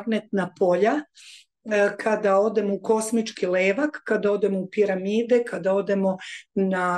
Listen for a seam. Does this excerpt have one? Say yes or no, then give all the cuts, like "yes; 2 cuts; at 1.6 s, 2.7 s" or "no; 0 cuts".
no; 0 cuts